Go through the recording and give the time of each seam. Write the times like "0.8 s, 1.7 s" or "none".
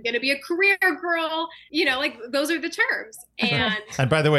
1.6 s